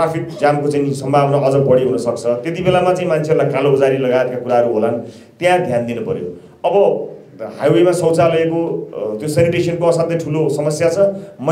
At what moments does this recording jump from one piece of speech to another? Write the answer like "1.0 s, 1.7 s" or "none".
none